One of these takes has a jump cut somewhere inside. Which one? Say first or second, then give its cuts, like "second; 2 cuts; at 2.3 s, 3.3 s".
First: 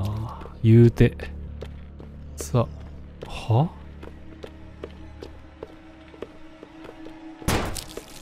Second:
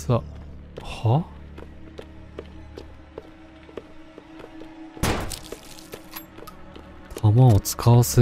first; 1 cut; at 1.4 s